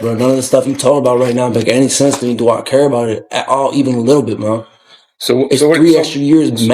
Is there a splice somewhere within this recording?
no; 0 cuts

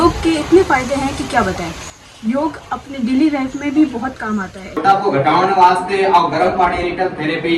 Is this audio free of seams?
no; 1 cut; at 4.7 s

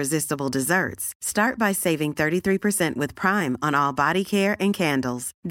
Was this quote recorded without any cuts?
yes; 0 cuts

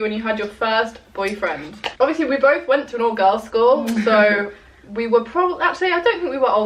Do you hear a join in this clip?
no; 0 cuts

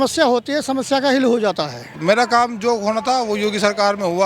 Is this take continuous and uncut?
no; 1 cut; at 2.0 s

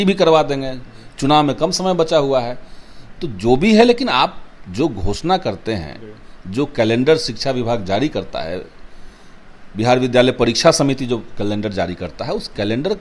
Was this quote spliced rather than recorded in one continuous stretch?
no; 0 cuts

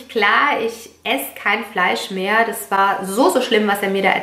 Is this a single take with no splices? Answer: yes; 0 cuts

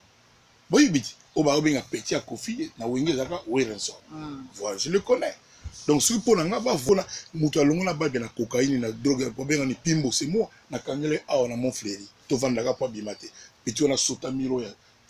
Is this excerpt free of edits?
no; 1 cut; at 6.8 s

